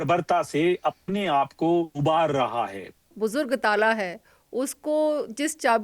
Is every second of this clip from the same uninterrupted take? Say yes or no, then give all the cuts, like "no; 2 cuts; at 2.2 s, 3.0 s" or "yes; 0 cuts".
no; 1 cut; at 3.1 s